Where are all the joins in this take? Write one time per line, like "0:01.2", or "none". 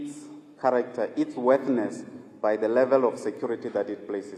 none